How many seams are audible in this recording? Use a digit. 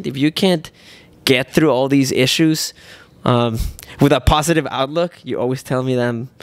0